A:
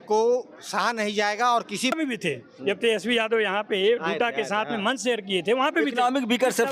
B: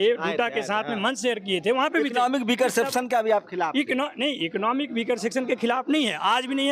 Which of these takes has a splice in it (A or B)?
A